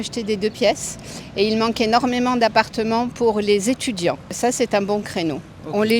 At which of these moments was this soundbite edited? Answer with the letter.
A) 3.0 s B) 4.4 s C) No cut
B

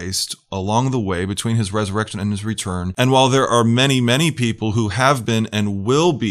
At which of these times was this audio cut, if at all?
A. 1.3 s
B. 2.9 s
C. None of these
B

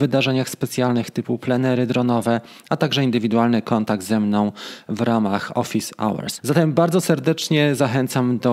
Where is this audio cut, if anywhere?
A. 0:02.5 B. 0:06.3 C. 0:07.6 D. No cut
B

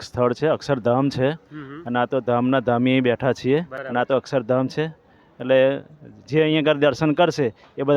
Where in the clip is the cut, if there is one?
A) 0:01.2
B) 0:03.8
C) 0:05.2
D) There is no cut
B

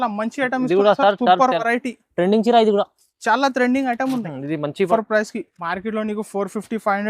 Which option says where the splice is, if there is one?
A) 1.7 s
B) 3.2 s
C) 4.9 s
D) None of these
C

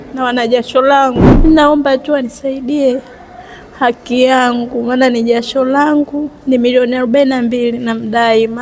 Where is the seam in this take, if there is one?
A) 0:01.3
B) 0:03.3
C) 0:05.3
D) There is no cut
A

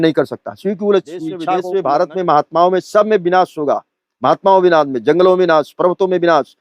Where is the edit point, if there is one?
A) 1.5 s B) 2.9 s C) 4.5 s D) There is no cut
A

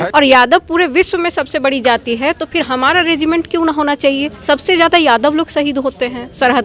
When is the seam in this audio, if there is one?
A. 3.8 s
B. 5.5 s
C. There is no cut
C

